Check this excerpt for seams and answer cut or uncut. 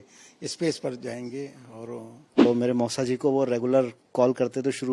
cut